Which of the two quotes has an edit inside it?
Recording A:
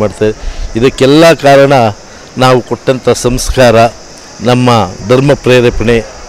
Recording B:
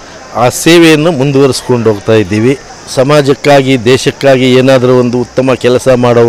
B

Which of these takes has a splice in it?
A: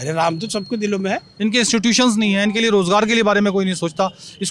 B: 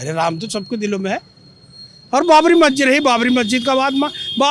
A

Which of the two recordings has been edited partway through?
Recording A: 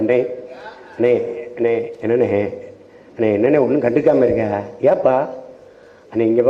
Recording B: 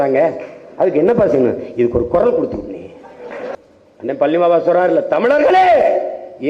B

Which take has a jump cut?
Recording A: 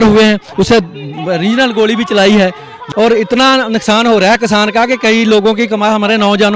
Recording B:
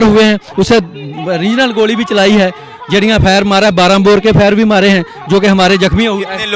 A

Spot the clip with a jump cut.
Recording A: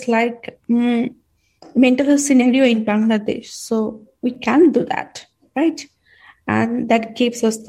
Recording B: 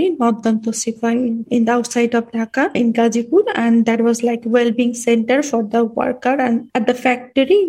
B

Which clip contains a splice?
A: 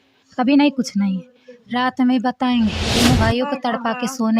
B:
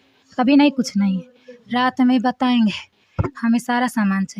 A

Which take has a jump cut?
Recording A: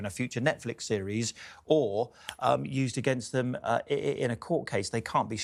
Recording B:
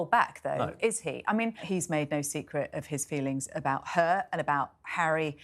B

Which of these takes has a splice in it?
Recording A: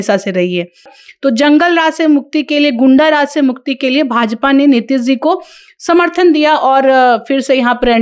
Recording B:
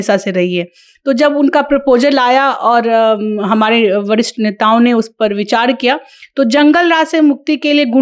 A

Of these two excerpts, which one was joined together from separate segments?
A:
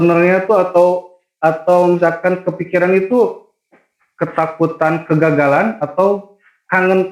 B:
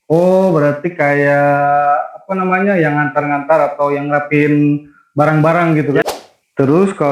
B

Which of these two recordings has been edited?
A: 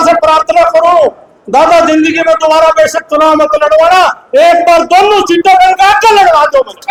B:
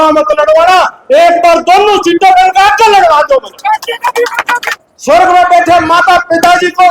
B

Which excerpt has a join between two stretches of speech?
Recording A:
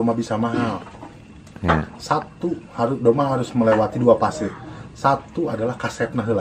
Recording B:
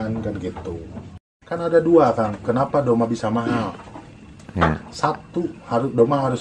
B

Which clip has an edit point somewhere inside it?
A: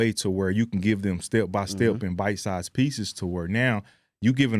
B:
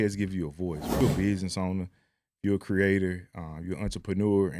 B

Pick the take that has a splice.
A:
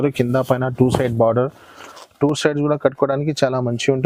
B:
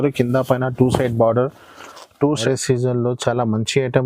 B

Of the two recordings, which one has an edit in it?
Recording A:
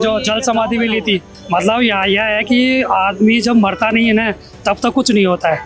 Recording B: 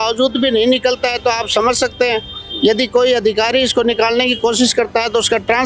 A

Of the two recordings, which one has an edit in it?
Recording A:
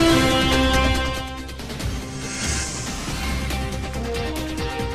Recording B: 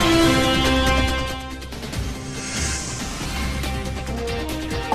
B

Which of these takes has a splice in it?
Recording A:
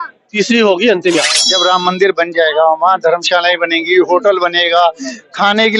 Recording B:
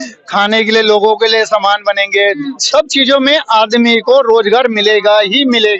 A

